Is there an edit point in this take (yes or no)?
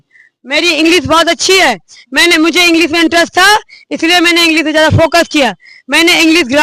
no